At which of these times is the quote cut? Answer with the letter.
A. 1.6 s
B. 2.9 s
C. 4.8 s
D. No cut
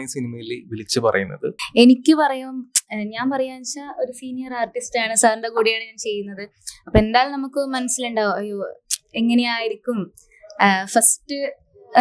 A